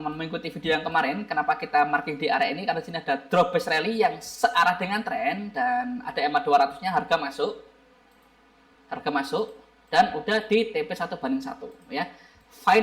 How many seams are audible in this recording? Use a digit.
0